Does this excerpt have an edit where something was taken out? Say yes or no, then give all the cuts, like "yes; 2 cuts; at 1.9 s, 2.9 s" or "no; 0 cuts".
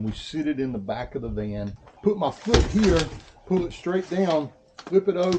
yes; 1 cut; at 1.8 s